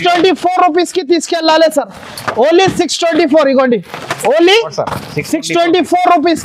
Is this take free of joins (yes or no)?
yes